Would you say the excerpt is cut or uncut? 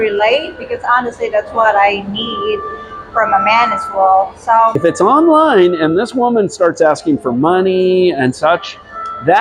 cut